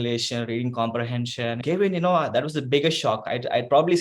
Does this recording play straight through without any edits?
no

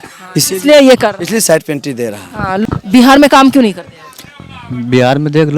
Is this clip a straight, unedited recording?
no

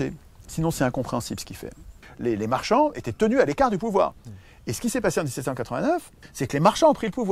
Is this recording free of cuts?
no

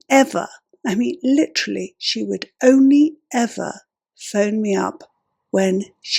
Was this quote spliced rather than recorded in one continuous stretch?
no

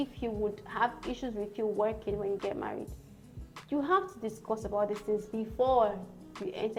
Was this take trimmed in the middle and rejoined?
no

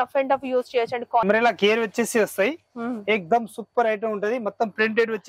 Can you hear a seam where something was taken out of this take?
yes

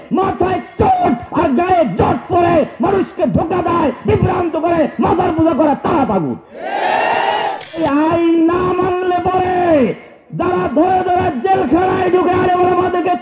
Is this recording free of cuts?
no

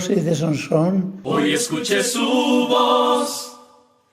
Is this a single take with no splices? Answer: no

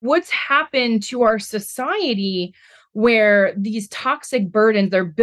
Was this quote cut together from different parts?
no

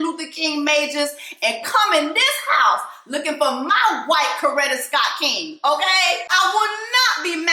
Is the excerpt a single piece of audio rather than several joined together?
no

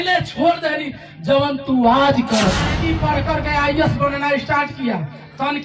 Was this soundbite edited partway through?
yes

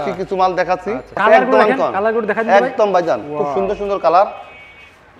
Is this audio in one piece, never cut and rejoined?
no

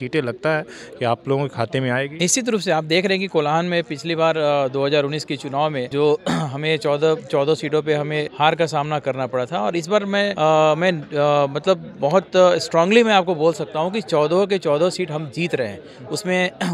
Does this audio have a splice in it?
no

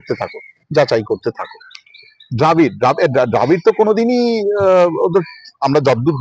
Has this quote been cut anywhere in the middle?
no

